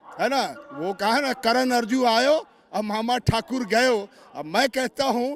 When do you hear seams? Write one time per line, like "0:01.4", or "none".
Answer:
none